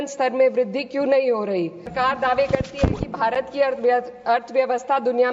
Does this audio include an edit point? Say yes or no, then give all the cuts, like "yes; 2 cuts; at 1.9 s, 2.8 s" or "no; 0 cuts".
yes; 1 cut; at 1.9 s